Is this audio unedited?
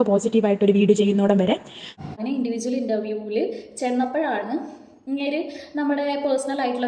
no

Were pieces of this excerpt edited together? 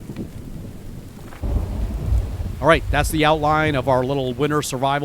yes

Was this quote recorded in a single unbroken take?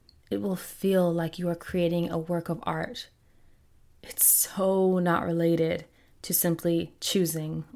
yes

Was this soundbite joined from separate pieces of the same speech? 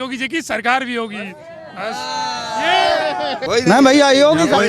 yes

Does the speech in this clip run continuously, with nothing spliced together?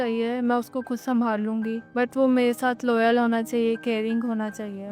no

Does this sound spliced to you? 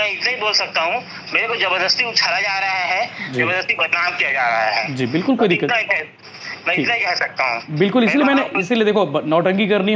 no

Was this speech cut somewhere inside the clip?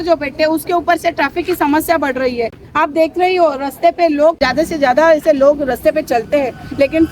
yes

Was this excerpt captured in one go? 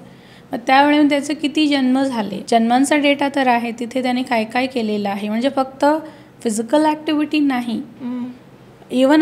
no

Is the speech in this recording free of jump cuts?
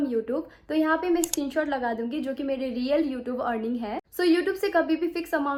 yes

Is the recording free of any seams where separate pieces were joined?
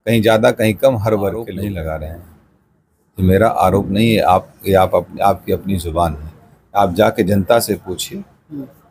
no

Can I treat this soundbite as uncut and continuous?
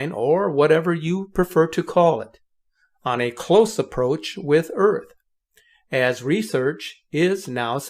no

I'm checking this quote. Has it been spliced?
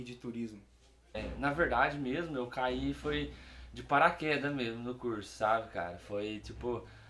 yes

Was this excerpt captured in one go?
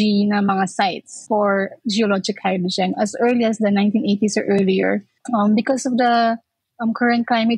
no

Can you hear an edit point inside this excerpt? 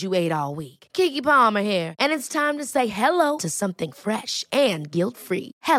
no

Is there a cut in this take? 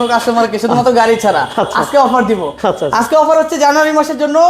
no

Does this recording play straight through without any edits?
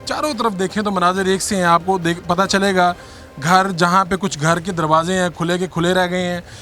yes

